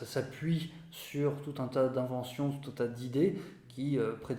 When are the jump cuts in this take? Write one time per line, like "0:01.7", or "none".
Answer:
none